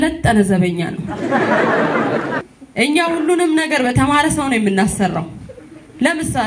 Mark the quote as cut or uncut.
cut